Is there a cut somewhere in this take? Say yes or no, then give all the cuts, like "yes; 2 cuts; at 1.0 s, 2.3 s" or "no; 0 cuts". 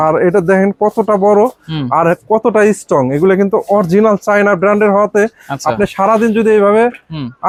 no; 0 cuts